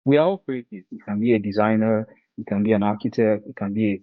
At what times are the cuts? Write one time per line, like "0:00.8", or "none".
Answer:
0:00.9